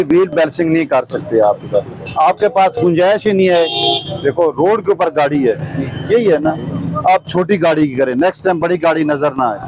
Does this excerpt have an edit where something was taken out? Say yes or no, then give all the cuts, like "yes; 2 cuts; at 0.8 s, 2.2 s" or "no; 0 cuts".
no; 0 cuts